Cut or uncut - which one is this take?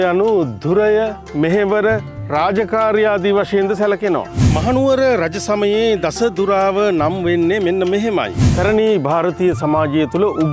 cut